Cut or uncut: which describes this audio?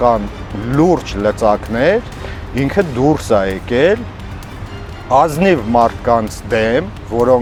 uncut